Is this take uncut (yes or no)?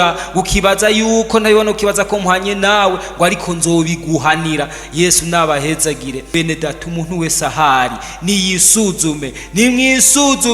no